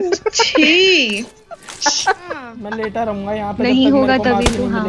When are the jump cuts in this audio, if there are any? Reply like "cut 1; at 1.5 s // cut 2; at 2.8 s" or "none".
cut 1; at 2.6 s